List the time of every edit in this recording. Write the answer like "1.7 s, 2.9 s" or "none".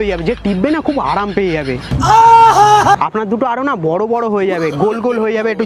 2.9 s